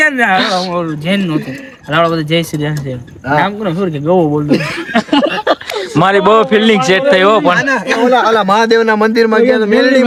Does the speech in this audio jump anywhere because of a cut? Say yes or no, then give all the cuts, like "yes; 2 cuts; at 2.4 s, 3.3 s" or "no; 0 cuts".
no; 0 cuts